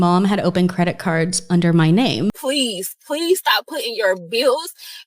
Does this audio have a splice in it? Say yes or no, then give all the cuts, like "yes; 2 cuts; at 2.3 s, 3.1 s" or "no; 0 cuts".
yes; 1 cut; at 2.4 s